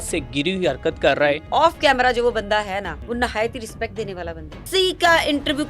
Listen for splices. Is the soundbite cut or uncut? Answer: cut